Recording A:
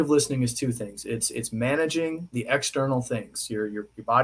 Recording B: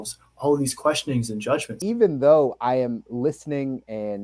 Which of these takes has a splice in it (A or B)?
B